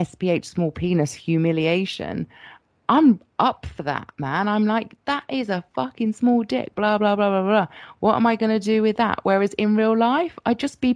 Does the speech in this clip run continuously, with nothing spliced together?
yes; 0 cuts

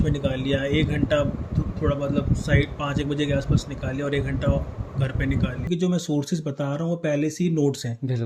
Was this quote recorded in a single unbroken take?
no; 1 cut; at 5.7 s

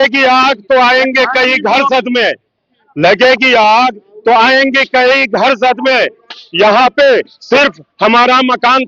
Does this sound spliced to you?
no; 0 cuts

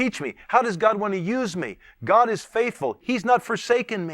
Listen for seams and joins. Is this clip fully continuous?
no; 1 cut; at 3.0 s

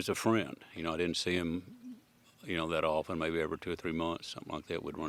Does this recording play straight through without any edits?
yes; 0 cuts

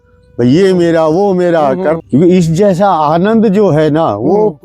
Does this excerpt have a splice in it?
yes; 1 cut; at 2.0 s

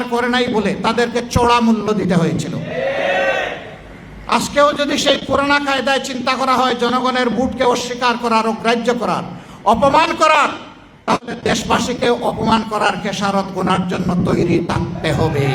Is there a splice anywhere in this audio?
no; 0 cuts

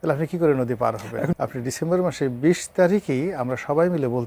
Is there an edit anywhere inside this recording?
yes; 1 cut; at 1.4 s

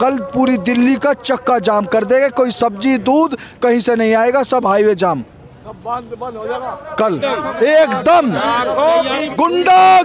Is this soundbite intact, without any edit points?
yes; 0 cuts

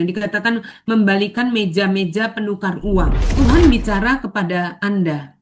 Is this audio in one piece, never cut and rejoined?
no; 1 cut; at 3.2 s

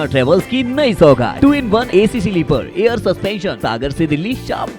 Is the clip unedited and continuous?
no; 2 cuts; at 1.5 s, 3.6 s

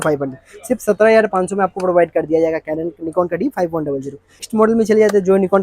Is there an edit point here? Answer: yes; 1 cut; at 4.5 s

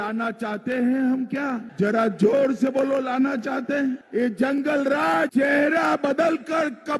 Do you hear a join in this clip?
yes; 3 cuts; at 1.7 s, 4.0 s, 5.3 s

